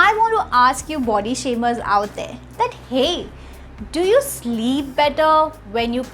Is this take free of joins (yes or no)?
yes